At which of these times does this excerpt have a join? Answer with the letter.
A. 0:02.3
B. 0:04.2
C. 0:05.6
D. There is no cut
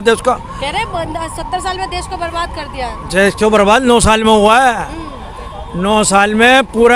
D